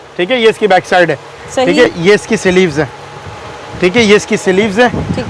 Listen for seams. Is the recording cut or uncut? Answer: uncut